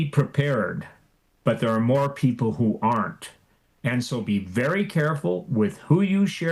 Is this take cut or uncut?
uncut